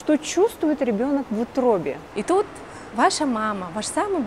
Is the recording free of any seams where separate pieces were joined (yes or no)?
no